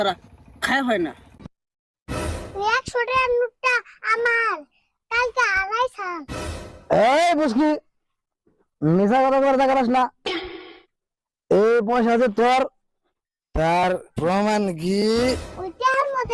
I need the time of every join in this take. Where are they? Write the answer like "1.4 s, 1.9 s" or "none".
1.5 s